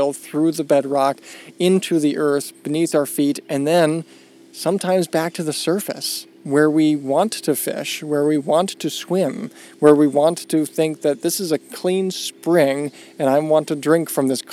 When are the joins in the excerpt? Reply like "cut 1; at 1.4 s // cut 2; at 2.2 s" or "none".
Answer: none